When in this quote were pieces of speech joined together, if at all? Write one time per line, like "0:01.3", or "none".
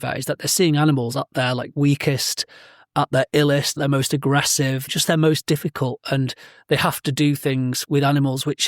0:02.9
0:03.7
0:04.9
0:07.8